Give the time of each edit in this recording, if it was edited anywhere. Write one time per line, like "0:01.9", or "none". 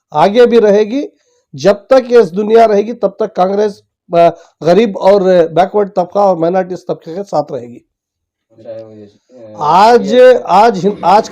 0:08.5